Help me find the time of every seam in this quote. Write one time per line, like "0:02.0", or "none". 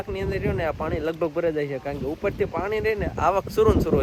none